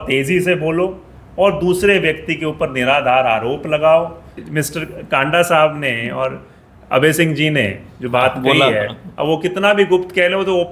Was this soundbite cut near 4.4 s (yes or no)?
yes